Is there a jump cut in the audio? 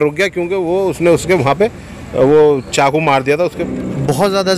yes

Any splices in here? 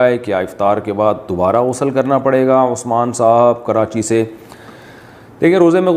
no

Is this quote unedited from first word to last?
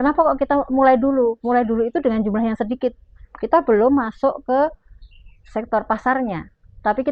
yes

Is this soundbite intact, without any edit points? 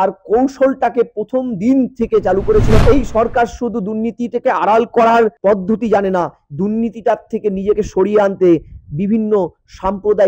no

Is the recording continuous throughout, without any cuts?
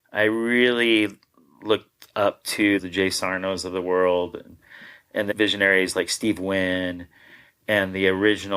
no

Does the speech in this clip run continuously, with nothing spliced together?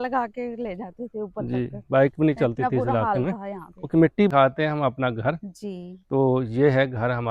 no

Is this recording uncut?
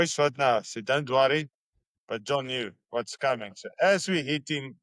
yes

